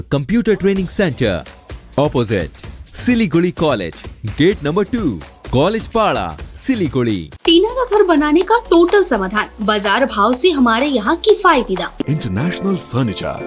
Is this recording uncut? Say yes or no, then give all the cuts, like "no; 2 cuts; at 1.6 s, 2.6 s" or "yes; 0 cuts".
no; 2 cuts; at 7.3 s, 12.0 s